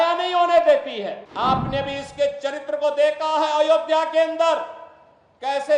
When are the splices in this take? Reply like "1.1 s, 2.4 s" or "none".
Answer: 1.2 s